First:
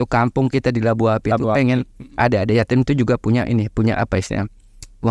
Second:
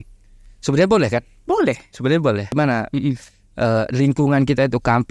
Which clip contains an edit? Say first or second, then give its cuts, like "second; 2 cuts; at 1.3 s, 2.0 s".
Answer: second; 1 cut; at 2.5 s